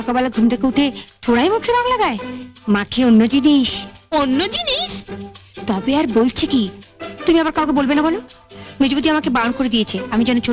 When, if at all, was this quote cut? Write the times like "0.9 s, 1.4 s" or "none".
none